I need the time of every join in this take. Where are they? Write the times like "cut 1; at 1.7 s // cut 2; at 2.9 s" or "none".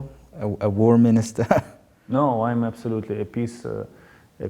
none

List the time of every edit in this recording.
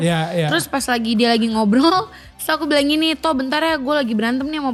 none

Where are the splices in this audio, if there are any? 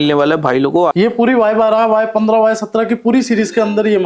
cut 1; at 0.9 s

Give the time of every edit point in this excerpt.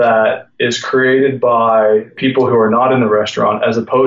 cut 1; at 2.1 s

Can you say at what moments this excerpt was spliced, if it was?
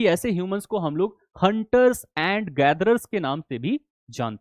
none

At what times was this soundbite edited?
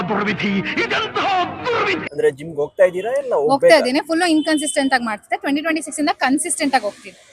cut 1; at 2.1 s

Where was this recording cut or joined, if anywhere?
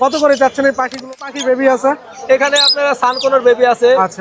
cut 1; at 1.0 s

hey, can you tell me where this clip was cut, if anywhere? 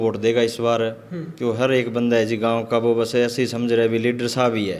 none

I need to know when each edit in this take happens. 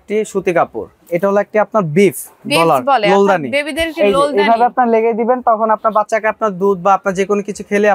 cut 1; at 1.0 s

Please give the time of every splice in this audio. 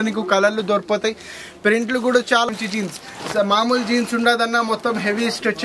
cut 1; at 2.5 s

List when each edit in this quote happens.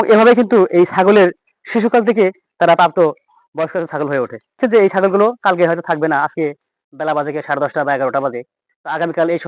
cut 1; at 4.6 s

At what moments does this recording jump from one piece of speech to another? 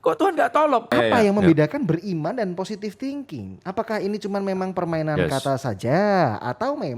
cut 1; at 0.9 s

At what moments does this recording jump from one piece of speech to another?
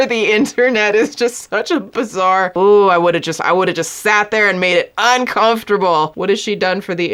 cut 1; at 2.5 s // cut 2; at 6.2 s

